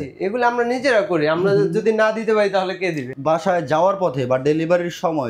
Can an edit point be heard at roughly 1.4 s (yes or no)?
no